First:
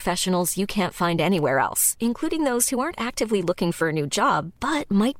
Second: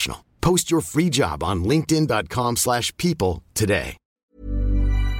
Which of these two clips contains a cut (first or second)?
second